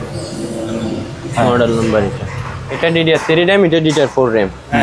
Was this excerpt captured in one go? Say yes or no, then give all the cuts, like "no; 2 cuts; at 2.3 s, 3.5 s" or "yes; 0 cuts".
no; 1 cut; at 2.7 s